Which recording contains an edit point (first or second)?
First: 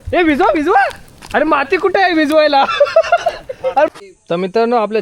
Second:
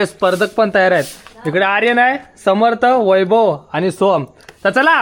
first